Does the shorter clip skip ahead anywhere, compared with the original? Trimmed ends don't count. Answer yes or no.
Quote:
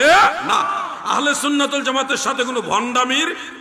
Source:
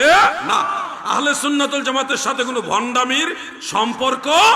no